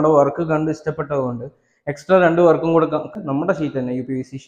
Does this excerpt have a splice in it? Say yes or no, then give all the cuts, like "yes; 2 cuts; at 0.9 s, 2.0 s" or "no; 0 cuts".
yes; 1 cut; at 3.1 s